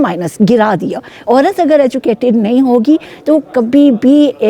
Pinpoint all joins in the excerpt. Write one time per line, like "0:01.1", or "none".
0:01.1

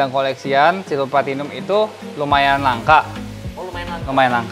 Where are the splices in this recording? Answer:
none

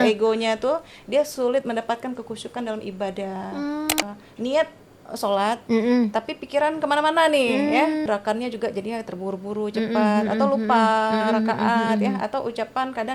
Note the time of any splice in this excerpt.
0:04.0
0:08.1

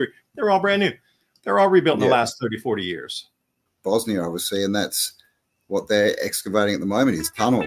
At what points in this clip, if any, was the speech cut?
0:03.7

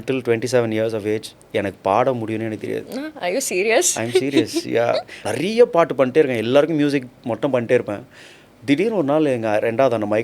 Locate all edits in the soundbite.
0:05.2

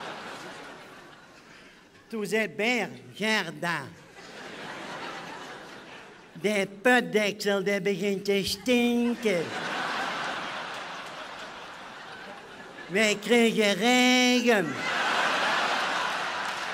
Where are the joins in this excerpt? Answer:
0:15.6

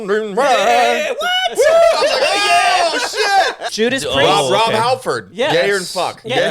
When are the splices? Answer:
0:03.7

